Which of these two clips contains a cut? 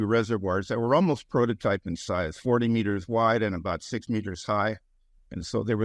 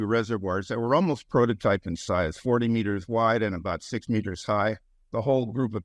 second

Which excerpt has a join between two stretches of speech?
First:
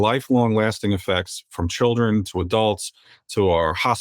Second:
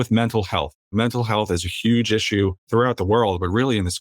second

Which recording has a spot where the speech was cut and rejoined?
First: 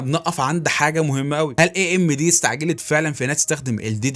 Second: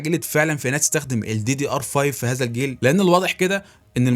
second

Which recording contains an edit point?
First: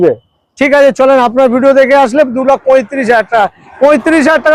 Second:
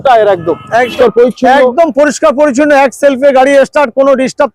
second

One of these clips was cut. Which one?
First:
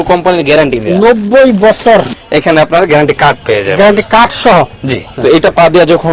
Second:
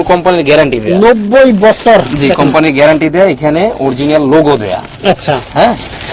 first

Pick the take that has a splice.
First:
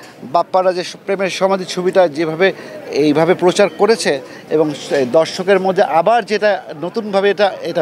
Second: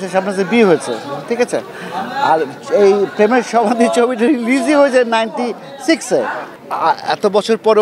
second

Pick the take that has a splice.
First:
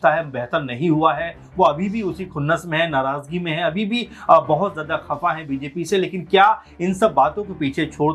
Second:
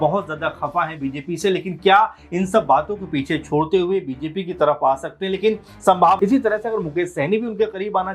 second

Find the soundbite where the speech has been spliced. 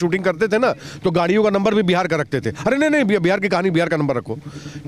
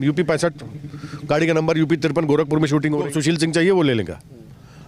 second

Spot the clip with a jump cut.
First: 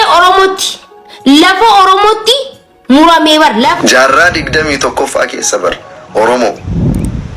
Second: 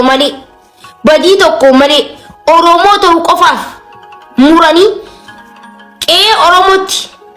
first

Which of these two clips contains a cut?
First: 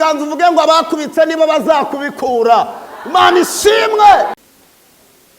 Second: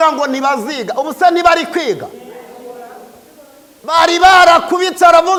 first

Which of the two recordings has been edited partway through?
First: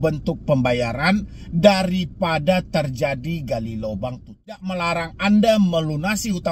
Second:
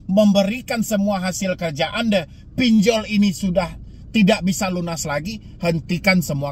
first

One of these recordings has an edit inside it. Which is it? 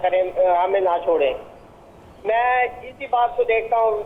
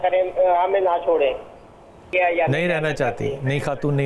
second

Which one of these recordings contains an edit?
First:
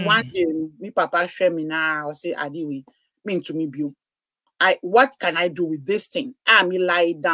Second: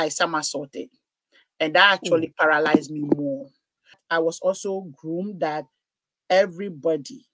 second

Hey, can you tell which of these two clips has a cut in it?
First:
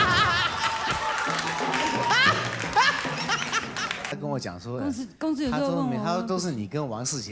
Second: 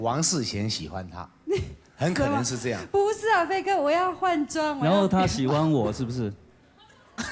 first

